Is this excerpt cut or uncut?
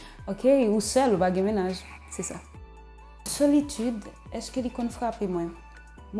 cut